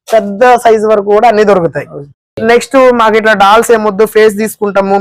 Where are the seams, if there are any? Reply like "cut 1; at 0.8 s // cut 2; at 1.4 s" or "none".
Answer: cut 1; at 2.3 s